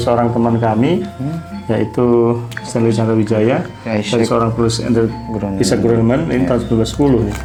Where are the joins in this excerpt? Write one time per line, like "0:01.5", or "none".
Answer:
none

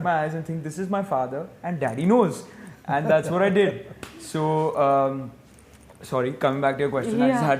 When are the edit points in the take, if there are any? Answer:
none

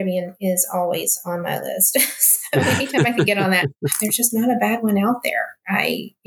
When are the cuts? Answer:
0:03.8

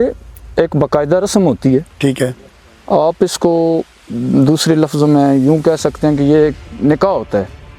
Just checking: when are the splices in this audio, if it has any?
none

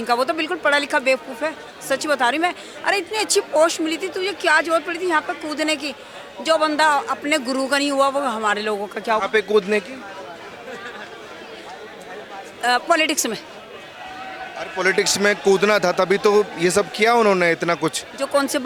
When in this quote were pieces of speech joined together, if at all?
none

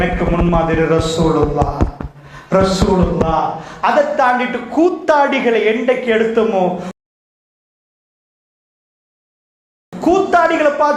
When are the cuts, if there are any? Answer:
none

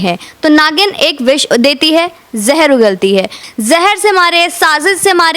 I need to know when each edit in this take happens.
0:03.5

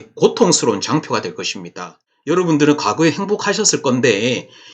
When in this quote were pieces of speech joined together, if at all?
0:01.9

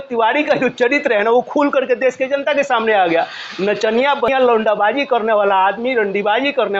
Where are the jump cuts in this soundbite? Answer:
0:04.3

